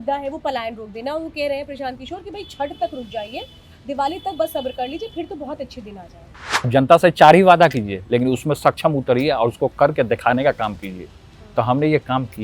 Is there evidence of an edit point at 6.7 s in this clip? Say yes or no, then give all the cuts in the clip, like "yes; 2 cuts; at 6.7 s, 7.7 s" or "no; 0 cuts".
yes; 1 cut; at 6.7 s